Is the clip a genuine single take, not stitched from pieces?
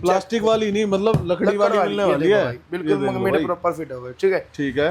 yes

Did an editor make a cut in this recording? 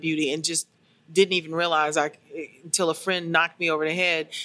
no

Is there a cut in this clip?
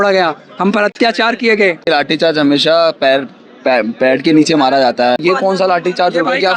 yes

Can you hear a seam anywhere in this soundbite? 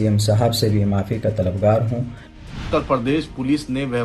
yes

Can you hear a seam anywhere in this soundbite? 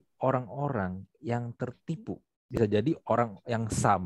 yes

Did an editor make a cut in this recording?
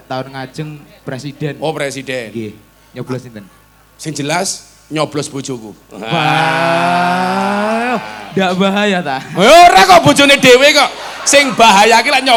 no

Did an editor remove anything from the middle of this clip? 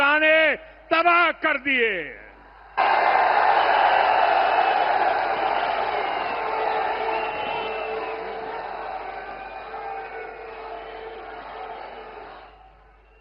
no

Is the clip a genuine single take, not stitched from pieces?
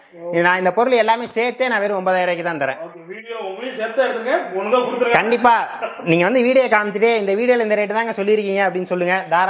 yes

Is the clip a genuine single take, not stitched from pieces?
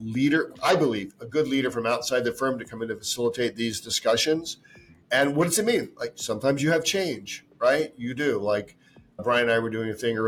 yes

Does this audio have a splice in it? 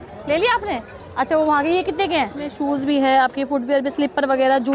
yes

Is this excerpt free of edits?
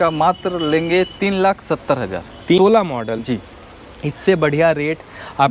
no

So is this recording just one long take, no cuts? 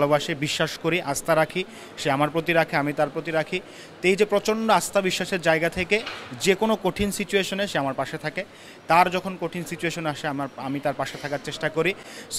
yes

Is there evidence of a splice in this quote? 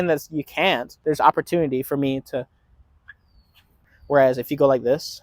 yes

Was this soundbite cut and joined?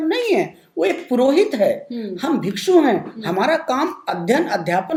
no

